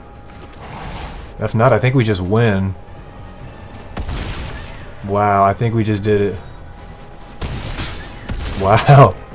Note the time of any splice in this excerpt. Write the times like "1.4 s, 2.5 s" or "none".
1.3 s, 2.9 s, 6.7 s